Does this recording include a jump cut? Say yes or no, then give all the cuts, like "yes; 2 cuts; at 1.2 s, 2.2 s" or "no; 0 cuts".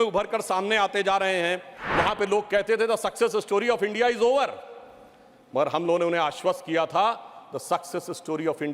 yes; 1 cut; at 1.8 s